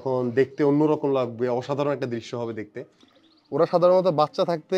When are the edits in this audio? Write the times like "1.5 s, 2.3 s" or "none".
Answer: 3.0 s

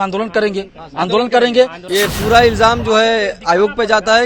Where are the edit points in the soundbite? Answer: 1.8 s

